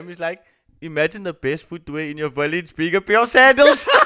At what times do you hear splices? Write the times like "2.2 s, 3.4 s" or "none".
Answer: none